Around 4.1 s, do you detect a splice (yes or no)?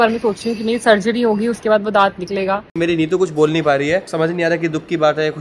yes